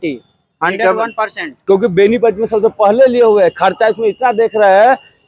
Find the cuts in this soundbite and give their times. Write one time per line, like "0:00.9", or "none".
0:01.5